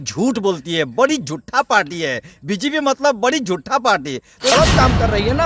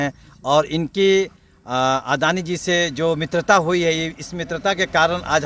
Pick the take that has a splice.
first; 1 cut; at 4.5 s

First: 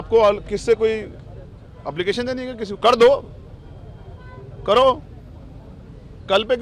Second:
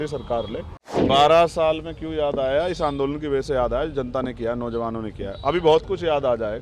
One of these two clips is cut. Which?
second; 1 cut; at 1.0 s

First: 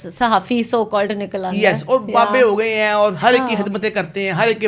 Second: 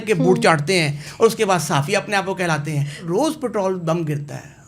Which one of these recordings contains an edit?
second; 1 cut; at 3.0 s

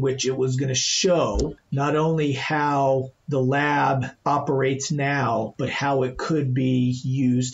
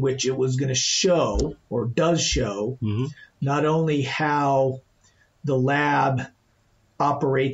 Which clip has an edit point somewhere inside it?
first; 3 cuts; at 1.6 s, 3.2 s, 4.1 s

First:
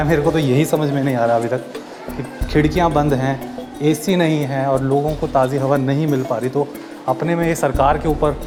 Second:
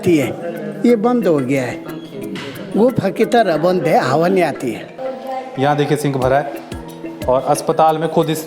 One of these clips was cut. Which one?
second; 1 cut; at 5.0 s

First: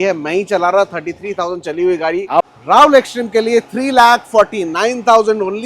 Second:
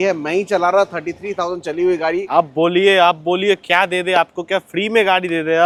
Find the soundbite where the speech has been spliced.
first; 1 cut; at 2.5 s

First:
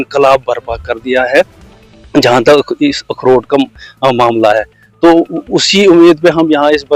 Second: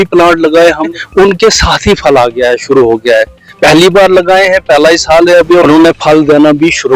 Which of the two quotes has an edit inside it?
second; 2 cuts; at 1.0 s, 5.6 s

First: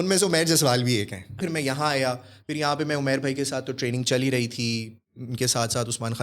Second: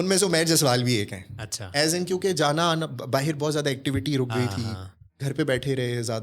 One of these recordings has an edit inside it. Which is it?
first; 1 cut; at 1.4 s

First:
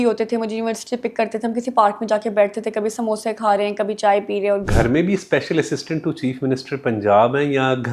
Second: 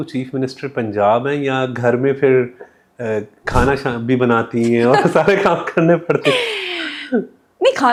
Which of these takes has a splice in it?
first; 1 cut; at 4.7 s

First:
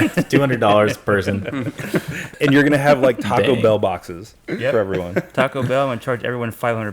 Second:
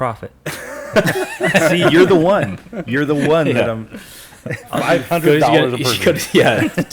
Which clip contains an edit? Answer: first; 1 cut; at 2.3 s

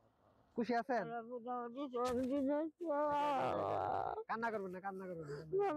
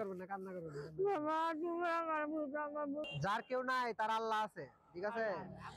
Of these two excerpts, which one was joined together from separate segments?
second; 1 cut; at 3.1 s

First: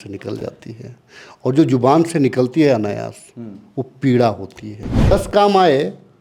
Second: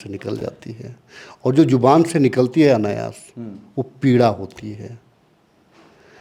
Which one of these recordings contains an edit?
first; 1 cut; at 5.1 s

